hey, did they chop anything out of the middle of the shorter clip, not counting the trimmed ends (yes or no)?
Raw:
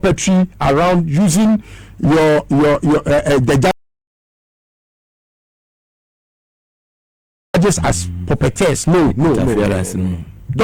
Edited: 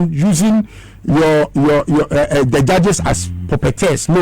yes